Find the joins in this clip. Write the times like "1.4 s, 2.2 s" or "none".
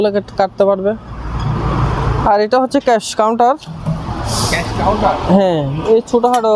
none